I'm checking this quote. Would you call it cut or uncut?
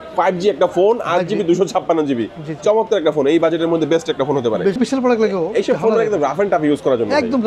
cut